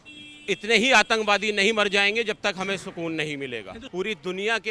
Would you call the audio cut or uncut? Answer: cut